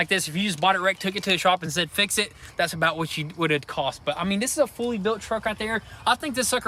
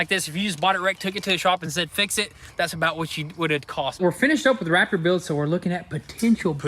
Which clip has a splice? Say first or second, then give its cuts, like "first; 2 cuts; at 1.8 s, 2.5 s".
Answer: second; 1 cut; at 4.0 s